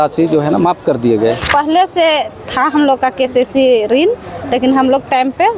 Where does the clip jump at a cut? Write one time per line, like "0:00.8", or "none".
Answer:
0:01.5